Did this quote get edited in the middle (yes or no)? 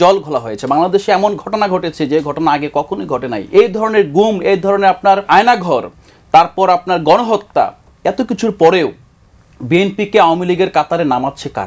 yes